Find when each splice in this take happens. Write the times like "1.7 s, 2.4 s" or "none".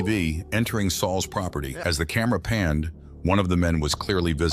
1.7 s